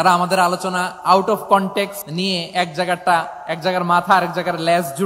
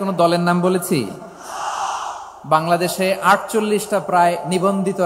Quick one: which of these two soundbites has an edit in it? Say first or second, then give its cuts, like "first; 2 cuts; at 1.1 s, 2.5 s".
first; 1 cut; at 2.0 s